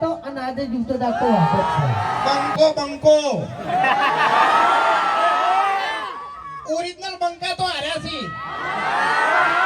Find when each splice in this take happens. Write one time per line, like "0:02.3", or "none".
0:02.5